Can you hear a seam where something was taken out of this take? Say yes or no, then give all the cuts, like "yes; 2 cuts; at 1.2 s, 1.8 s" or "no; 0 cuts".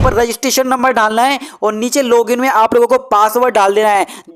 no; 0 cuts